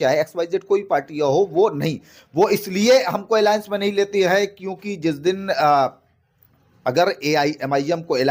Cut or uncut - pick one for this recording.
uncut